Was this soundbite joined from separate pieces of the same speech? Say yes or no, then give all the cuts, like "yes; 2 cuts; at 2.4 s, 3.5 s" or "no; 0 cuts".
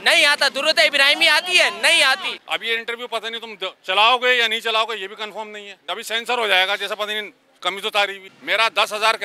yes; 3 cuts; at 2.3 s, 5.8 s, 8.3 s